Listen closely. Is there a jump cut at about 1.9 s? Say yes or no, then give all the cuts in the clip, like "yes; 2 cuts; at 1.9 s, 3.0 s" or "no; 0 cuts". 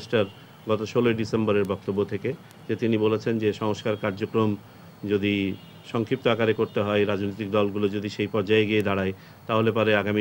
no; 0 cuts